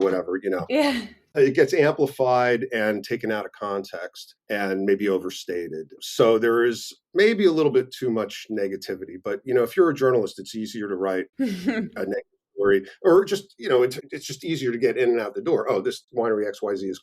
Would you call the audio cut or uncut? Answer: cut